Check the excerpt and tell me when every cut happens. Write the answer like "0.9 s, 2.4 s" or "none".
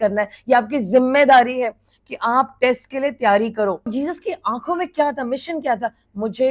3.9 s